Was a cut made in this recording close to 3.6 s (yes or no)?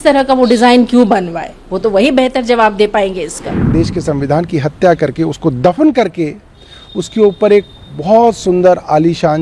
yes